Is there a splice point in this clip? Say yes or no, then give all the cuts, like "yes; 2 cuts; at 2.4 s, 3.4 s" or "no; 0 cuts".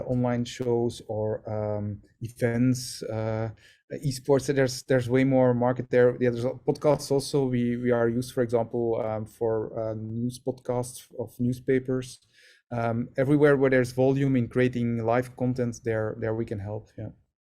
no; 0 cuts